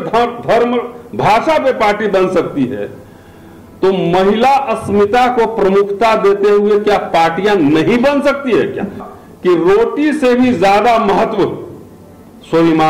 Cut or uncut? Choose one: cut